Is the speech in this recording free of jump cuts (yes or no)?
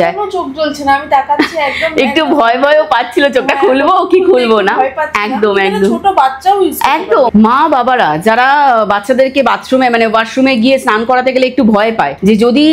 yes